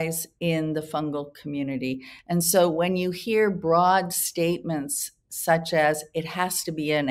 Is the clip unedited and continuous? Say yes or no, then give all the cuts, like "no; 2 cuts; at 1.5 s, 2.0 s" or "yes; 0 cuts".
yes; 0 cuts